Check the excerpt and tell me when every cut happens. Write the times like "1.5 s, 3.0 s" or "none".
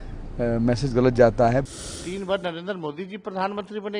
1.7 s

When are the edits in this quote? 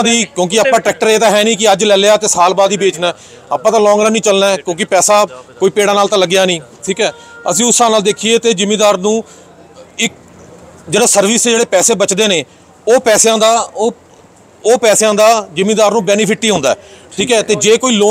none

